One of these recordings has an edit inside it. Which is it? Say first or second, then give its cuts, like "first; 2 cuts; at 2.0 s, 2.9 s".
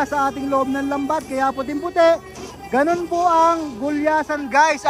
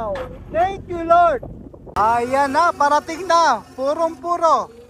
second; 1 cut; at 1.8 s